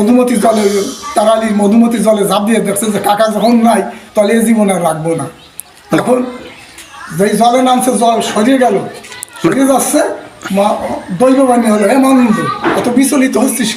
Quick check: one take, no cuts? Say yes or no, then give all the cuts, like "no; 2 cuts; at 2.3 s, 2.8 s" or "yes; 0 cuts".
yes; 0 cuts